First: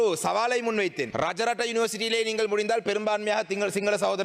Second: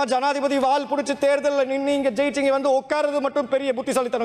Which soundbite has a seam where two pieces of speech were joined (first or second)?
first